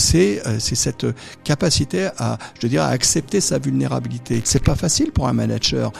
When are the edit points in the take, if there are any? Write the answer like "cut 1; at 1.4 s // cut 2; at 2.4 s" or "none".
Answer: cut 1; at 4.4 s